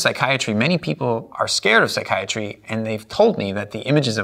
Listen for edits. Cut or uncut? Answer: cut